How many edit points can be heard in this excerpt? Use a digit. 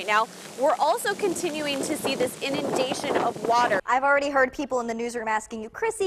1